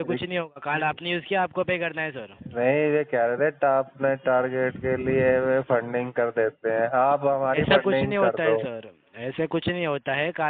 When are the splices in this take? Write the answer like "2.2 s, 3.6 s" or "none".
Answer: none